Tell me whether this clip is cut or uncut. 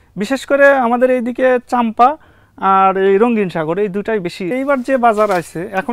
cut